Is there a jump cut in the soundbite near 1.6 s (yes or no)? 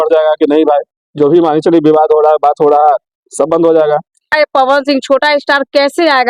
no